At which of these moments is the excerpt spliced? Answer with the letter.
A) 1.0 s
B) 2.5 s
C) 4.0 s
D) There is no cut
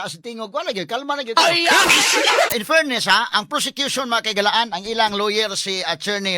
B